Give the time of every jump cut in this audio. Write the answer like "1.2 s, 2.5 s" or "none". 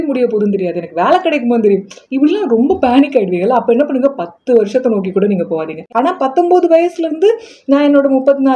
5.8 s